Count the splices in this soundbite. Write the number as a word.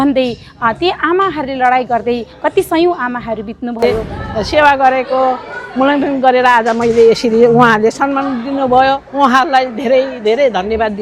one